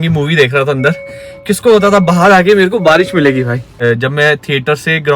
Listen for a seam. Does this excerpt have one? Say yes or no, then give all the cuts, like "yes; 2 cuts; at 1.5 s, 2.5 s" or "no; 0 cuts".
no; 0 cuts